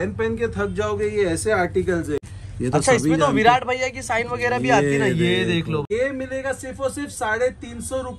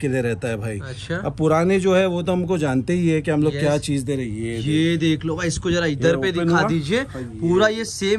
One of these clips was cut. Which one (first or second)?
first